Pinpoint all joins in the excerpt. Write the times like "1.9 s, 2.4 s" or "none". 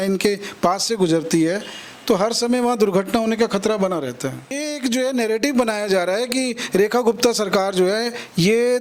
4.6 s